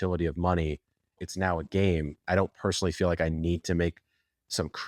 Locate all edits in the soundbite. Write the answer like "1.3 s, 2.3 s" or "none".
1.2 s, 2.2 s